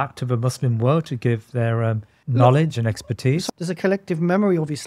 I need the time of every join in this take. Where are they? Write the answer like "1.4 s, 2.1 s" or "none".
2.1 s, 3.4 s